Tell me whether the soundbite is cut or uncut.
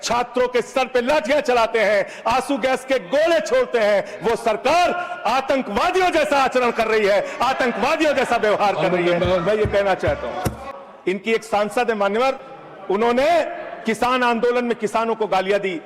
cut